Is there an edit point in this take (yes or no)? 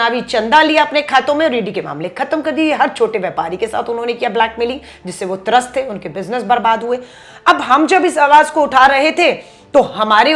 no